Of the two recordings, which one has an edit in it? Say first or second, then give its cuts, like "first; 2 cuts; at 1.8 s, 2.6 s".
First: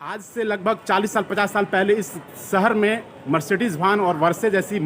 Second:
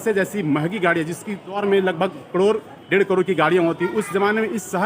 second; 1 cut; at 1.6 s